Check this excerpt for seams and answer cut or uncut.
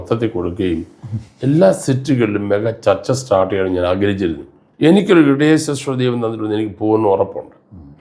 cut